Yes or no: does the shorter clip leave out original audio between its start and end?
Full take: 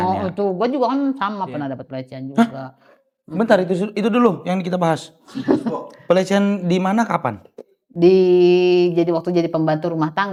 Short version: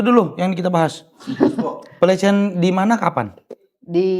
no